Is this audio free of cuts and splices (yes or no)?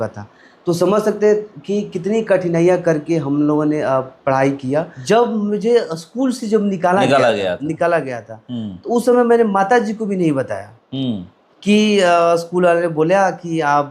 no